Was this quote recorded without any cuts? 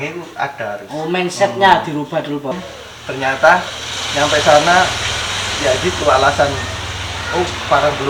no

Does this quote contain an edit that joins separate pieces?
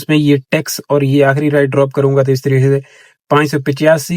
no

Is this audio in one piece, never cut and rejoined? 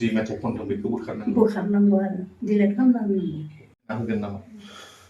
no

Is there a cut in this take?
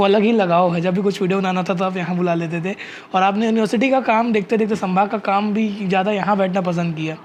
no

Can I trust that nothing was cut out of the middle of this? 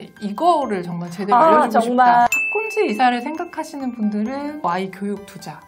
no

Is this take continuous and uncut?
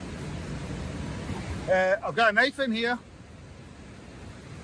no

